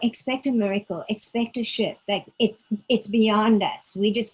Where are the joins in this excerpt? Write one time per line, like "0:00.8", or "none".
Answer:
none